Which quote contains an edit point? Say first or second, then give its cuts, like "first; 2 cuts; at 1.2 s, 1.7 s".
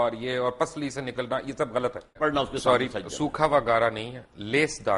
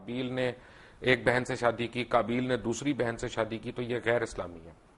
first; 1 cut; at 2.2 s